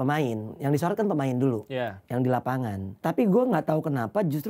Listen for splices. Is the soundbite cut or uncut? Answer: cut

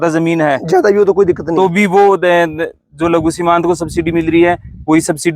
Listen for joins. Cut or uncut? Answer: uncut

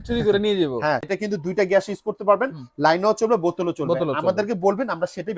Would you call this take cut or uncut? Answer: cut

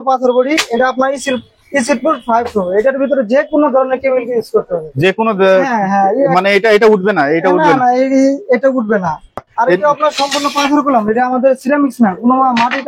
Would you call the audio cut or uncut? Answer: cut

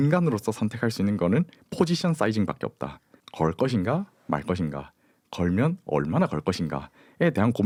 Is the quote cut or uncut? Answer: uncut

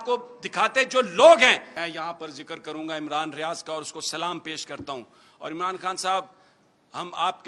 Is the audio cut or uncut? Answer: cut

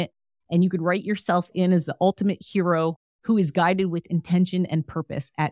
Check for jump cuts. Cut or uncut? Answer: uncut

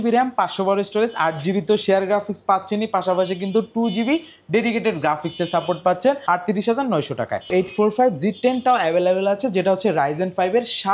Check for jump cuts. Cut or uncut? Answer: cut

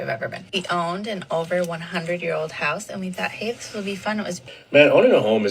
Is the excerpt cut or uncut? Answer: cut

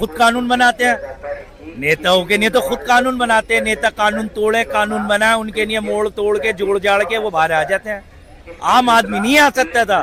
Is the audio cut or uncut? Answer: uncut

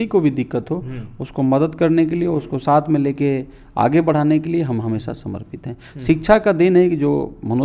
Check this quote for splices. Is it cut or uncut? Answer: uncut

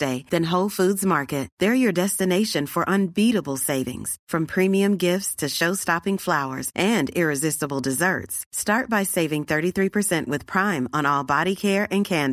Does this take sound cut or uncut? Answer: uncut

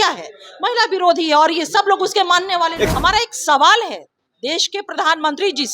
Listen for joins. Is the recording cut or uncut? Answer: cut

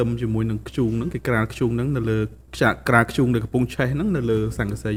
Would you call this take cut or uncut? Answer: uncut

